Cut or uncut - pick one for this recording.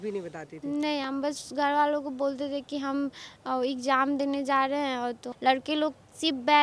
cut